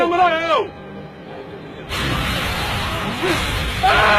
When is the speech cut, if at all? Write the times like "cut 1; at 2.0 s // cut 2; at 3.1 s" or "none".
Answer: cut 1; at 1.4 s